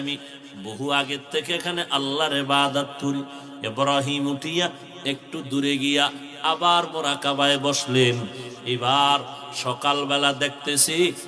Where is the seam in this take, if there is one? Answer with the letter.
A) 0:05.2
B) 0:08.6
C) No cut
C